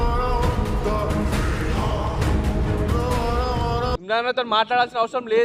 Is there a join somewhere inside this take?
yes; 1 cut; at 4.0 s

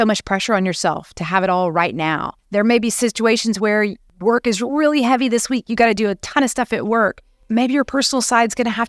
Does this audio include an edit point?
yes; 3 cuts; at 2.3 s, 4.1 s, 7.3 s

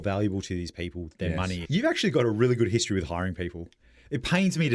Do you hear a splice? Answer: yes; 1 cut; at 1.6 s

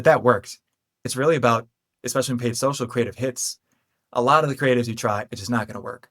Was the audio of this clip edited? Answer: yes; 1 cut; at 1.1 s

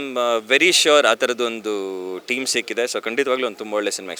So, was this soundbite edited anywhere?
no; 0 cuts

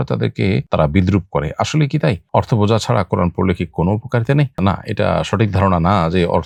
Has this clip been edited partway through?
no; 0 cuts

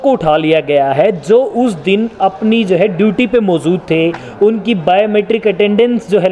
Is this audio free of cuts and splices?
yes; 0 cuts

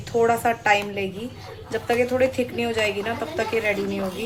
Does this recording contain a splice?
no; 0 cuts

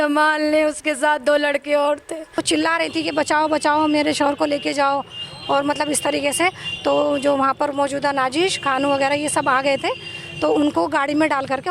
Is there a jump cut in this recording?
yes; 1 cut; at 2.4 s

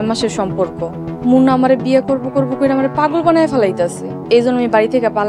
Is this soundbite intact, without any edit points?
no; 2 cuts; at 1.1 s, 4.1 s

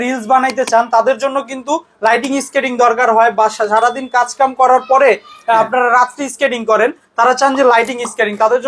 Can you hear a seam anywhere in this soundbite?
no; 0 cuts

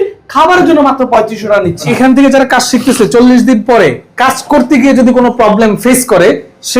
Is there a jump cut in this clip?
yes; 1 cut; at 1.9 s

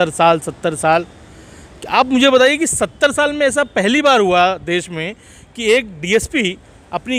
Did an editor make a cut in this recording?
no; 0 cuts

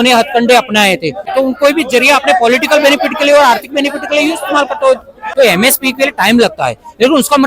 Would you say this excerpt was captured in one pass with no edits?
no; 2 cuts; at 1.2 s, 5.2 s

